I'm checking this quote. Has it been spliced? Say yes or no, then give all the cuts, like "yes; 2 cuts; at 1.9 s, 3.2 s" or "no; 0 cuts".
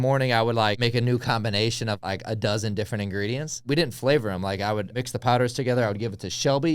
yes; 4 cuts; at 0.8 s, 2.0 s, 3.6 s, 4.9 s